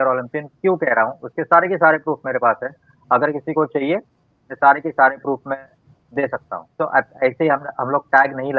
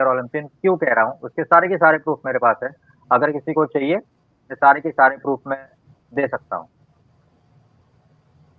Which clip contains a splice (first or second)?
first